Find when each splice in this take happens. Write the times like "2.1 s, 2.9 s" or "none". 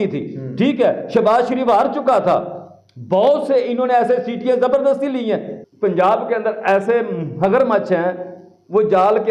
5.5 s